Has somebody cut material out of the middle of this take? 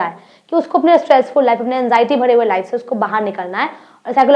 no; 0 cuts

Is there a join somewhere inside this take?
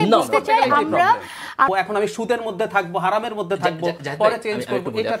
yes; 1 cut; at 1.7 s

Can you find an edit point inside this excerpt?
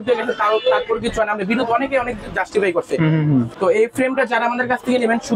yes; 1 cut; at 3.5 s

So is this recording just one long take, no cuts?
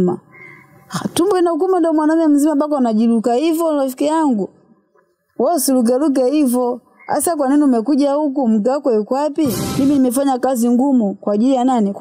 no; 1 cut; at 9.6 s

